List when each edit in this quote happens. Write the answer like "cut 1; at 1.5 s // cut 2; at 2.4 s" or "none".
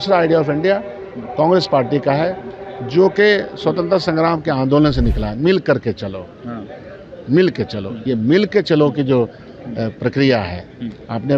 none